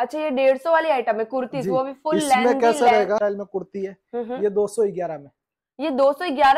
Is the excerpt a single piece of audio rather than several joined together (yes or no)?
no